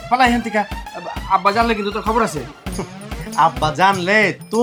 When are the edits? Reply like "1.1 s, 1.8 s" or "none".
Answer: none